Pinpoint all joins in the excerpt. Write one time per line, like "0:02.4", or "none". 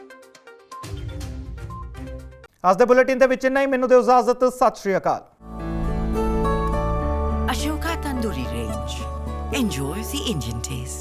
none